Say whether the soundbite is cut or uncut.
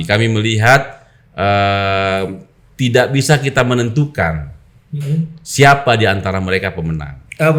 uncut